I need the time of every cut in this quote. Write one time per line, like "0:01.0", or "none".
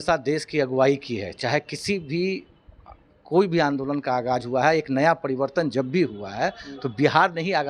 none